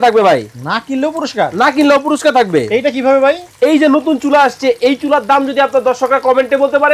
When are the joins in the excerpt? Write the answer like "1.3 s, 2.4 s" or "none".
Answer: none